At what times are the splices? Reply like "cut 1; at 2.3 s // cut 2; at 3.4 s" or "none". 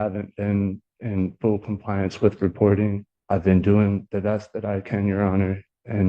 cut 1; at 3.1 s

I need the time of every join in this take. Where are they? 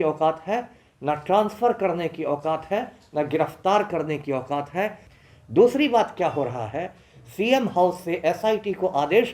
cut 1; at 5.1 s

